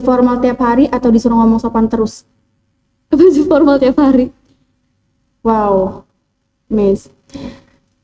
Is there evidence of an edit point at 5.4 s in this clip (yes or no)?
no